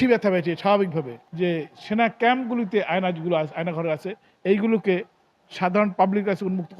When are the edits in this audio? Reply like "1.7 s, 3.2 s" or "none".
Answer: 1.2 s